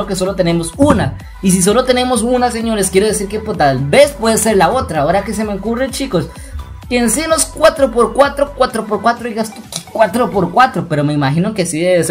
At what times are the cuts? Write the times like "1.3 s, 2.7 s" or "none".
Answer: none